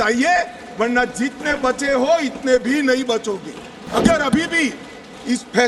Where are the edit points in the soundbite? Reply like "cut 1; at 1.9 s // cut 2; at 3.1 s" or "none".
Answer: cut 1; at 3.9 s